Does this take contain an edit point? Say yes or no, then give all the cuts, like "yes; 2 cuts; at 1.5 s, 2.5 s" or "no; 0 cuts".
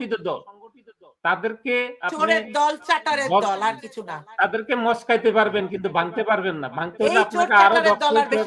no; 0 cuts